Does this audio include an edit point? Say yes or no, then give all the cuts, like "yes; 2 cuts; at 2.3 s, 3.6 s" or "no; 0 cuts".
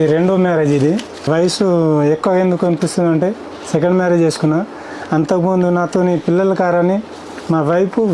yes; 1 cut; at 1.3 s